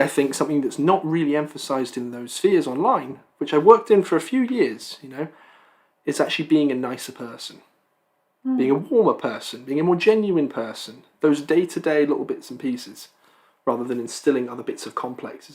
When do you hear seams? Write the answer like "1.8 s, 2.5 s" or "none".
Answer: none